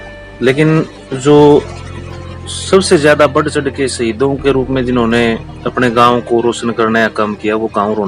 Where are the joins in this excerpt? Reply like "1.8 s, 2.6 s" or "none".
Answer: none